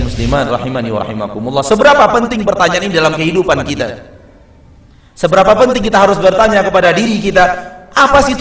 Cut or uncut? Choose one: uncut